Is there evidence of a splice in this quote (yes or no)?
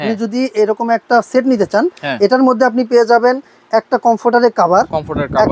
no